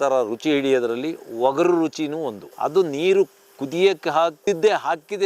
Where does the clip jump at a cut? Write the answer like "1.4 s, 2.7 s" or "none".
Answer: 2.4 s, 4.4 s